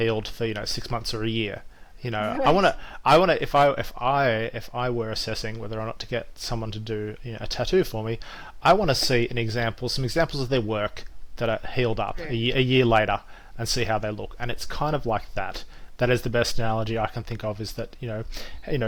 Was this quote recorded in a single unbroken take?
yes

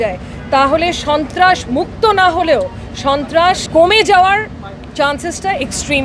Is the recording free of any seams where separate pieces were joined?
no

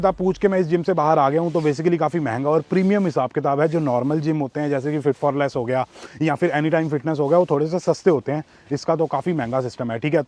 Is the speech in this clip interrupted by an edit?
no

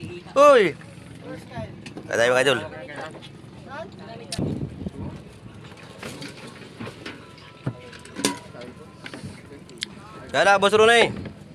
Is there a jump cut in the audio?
yes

